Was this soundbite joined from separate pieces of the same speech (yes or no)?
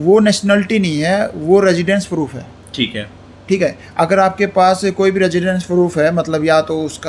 no